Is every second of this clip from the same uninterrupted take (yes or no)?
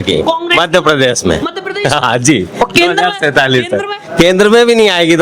yes